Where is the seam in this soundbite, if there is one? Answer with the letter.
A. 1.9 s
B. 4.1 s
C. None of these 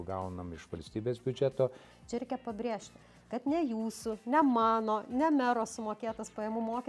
A